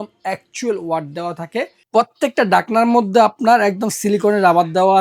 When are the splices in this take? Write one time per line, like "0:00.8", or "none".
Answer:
0:01.8